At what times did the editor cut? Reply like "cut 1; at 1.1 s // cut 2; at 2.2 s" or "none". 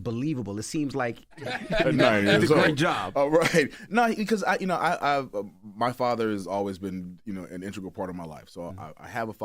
cut 1; at 1.6 s